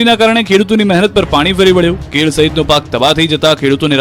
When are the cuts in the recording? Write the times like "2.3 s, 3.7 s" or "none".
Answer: none